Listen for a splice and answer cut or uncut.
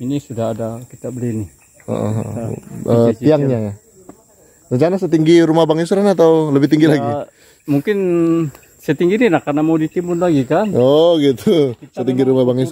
uncut